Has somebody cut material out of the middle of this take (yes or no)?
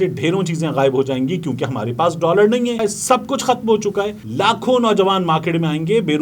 yes